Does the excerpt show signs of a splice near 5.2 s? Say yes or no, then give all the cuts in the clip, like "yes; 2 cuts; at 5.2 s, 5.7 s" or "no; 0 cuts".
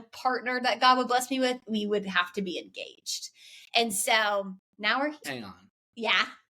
yes; 1 cut; at 5.2 s